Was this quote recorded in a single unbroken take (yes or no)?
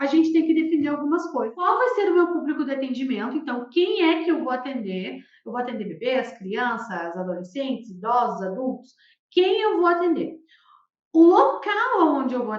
no